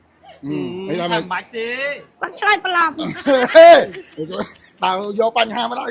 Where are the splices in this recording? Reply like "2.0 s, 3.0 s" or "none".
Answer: none